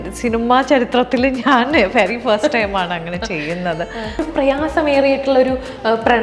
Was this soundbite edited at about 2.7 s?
no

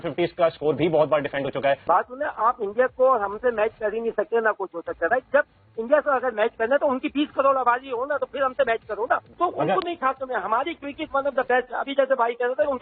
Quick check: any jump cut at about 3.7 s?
no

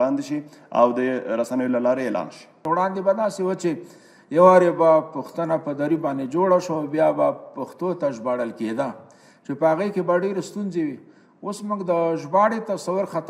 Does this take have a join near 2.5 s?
yes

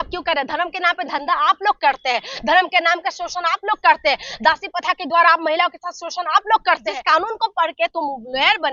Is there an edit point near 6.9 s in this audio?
yes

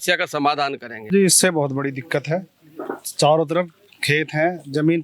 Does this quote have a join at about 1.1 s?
yes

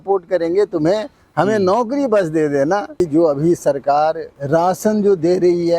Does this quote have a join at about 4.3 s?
yes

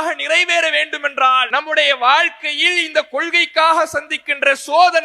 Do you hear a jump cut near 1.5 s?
yes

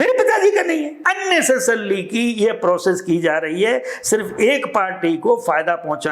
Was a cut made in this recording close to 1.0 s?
yes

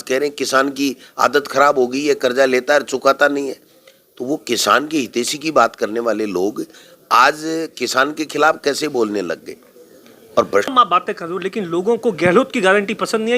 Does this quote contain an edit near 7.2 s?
no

